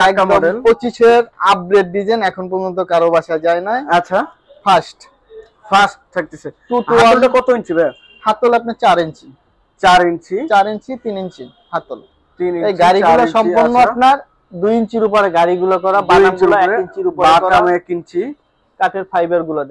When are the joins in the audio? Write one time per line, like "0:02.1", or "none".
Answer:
none